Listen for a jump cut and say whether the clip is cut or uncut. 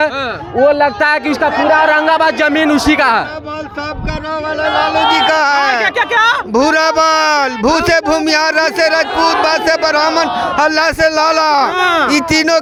uncut